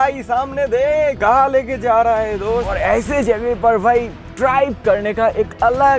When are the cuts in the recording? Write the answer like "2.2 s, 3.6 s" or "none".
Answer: 1.2 s, 2.7 s